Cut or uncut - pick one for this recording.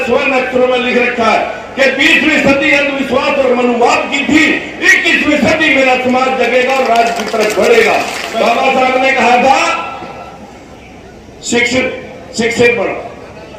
cut